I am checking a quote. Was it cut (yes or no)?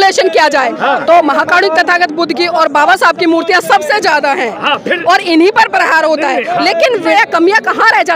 yes